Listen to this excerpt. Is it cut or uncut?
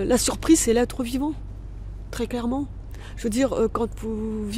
uncut